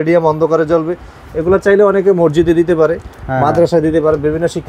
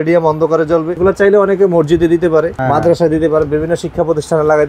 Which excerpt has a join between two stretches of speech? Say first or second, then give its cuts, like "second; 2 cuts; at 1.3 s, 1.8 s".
second; 2 cuts; at 0.9 s, 2.6 s